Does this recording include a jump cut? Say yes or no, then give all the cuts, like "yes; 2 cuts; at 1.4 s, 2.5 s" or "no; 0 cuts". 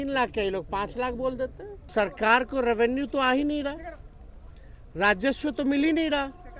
yes; 1 cut; at 1.9 s